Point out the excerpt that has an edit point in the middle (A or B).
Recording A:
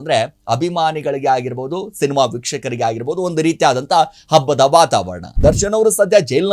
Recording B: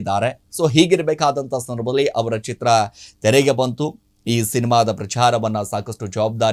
A